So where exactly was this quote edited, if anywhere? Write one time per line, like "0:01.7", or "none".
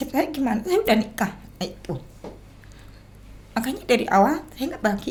none